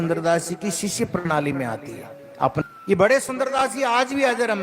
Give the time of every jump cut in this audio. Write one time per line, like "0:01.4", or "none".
0:02.6